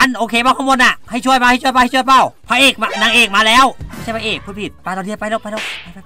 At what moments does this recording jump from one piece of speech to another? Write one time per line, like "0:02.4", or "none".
0:04.8